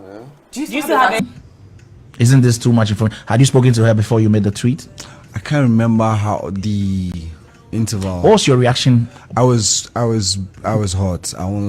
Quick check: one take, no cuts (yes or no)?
no